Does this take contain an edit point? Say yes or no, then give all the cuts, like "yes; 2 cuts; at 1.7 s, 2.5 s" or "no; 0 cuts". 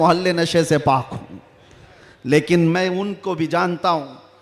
no; 0 cuts